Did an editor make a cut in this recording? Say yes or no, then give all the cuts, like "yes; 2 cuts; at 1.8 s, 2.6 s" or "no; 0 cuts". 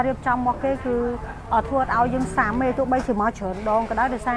no; 0 cuts